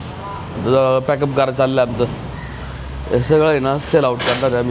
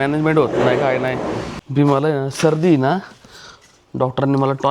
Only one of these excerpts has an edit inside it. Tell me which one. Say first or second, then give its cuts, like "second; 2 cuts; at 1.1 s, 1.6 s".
second; 1 cut; at 1.5 s